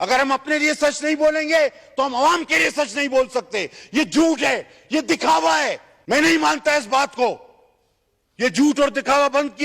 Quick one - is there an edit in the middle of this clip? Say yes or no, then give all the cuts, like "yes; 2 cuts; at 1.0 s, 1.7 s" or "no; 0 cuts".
yes; 1 cut; at 5.9 s